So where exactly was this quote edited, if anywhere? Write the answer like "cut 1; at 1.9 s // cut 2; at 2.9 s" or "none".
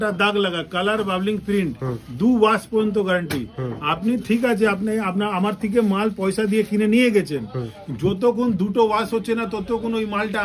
none